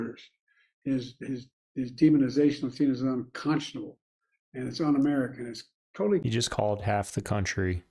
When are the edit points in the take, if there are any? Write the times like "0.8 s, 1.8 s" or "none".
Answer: 6.2 s